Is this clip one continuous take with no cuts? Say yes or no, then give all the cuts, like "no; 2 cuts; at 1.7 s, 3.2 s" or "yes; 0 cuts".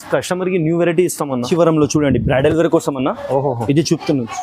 no; 1 cut; at 1.5 s